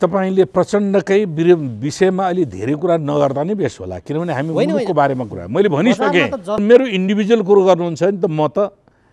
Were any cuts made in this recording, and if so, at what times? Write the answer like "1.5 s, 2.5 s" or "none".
6.6 s